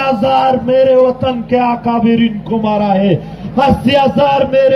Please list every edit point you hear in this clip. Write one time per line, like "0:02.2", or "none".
0:03.4